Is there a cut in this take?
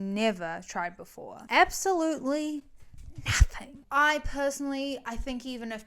yes; 1 cut; at 3.8 s

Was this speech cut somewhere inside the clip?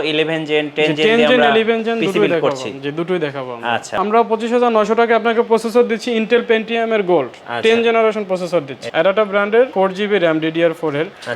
yes; 3 cuts; at 3.9 s, 8.8 s, 9.7 s

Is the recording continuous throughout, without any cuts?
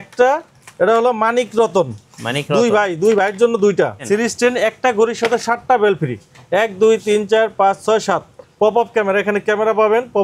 no; 2 cuts; at 4.0 s, 8.4 s

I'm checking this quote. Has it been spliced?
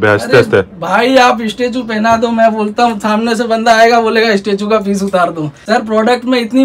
yes; 1 cut; at 5.5 s

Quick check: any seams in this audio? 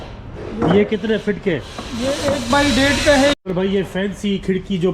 yes; 1 cut; at 3.3 s

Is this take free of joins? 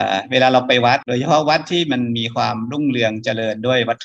no; 1 cut; at 1.1 s

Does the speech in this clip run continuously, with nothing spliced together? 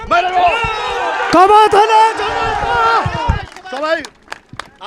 yes; 0 cuts

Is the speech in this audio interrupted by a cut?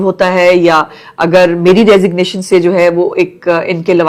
no; 0 cuts

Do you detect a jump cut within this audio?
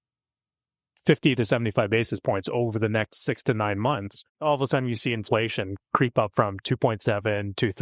yes; 1 cut; at 4.3 s

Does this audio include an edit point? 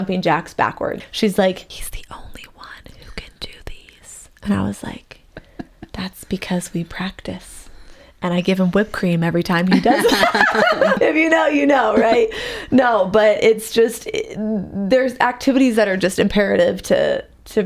yes; 3 cuts; at 1.0 s, 1.8 s, 11.0 s

